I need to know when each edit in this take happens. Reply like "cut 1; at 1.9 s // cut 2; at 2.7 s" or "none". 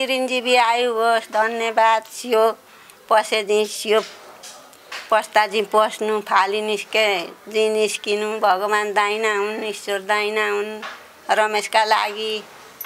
none

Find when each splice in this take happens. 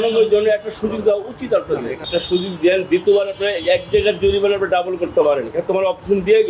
none

